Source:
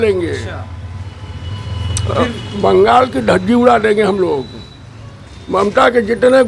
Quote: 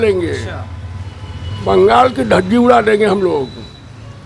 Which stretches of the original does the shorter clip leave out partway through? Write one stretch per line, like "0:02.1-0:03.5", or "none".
0:01.5-0:02.5